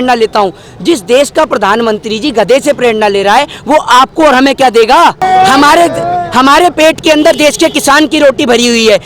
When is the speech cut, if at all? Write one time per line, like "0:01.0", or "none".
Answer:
0:05.2